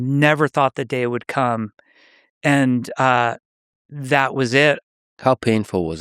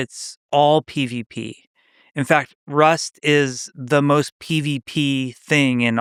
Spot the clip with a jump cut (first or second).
first